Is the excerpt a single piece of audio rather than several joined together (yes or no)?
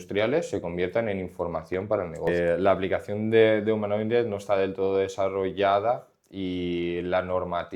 no